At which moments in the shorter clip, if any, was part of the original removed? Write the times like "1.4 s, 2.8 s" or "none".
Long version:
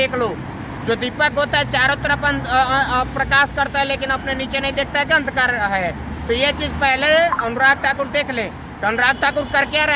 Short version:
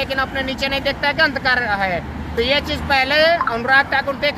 none